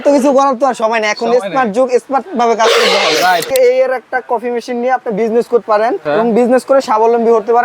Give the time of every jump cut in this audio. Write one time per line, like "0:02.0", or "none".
0:03.5
0:05.6